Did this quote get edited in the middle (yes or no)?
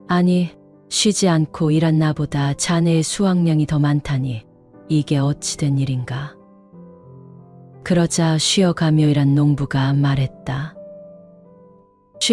yes